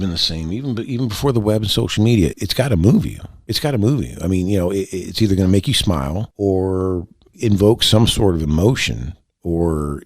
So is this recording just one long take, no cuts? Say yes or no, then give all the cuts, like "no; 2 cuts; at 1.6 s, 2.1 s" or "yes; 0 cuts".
no; 2 cuts; at 2.4 s, 6.2 s